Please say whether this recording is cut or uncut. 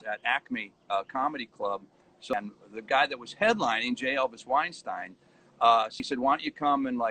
cut